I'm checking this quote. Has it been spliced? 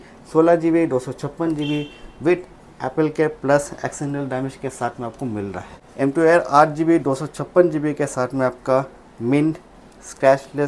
yes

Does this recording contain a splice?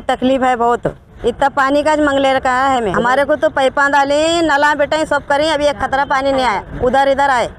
yes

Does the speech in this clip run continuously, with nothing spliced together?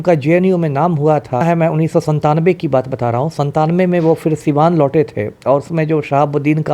no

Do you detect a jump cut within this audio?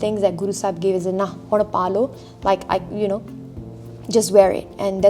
no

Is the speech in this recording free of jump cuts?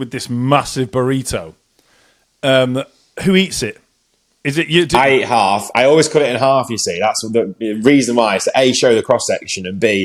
yes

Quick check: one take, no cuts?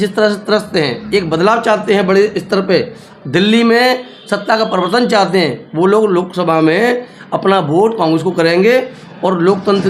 yes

